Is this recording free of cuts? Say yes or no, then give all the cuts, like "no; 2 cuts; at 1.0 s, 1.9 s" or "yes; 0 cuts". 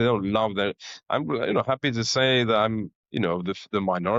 yes; 0 cuts